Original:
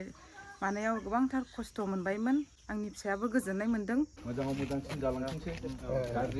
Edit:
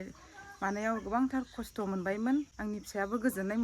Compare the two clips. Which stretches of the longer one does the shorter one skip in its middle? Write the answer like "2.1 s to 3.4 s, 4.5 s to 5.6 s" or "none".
2.5 s to 2.6 s